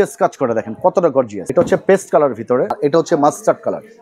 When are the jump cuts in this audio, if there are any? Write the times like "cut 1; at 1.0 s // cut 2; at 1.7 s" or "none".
cut 1; at 1.4 s // cut 2; at 2.7 s